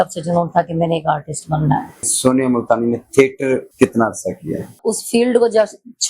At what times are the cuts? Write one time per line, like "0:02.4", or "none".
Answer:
0:02.1
0:03.7
0:04.8